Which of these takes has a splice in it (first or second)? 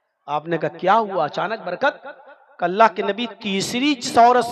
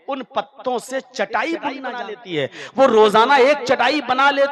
second